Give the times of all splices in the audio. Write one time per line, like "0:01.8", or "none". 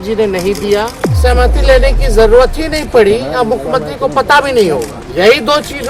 0:01.0
0:05.0